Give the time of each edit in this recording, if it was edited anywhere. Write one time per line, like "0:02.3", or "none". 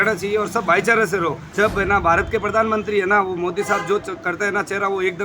0:01.4